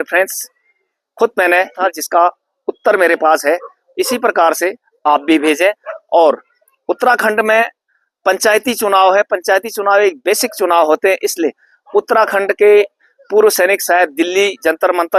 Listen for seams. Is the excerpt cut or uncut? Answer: cut